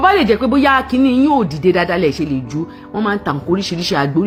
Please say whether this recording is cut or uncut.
uncut